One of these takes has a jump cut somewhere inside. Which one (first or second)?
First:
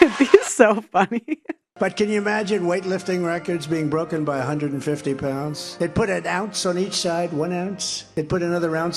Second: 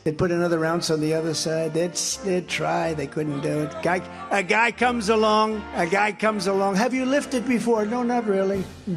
first